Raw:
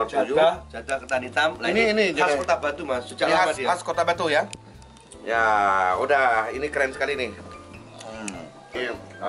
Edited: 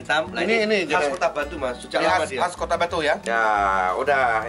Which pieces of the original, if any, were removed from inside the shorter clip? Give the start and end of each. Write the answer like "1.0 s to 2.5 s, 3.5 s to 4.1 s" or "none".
4.5 s to 5.2 s